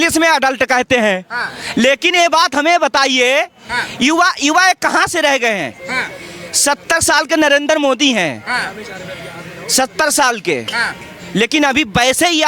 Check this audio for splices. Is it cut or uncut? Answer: uncut